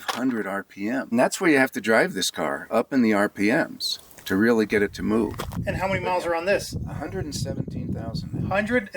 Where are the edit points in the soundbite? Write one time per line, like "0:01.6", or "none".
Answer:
0:01.1
0:05.5
0:06.8